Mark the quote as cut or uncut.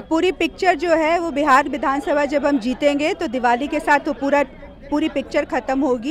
uncut